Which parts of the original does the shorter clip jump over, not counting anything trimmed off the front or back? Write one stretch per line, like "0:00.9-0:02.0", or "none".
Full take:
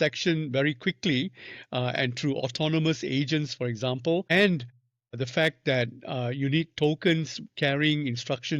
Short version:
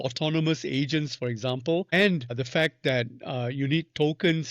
0:04.7-0:05.2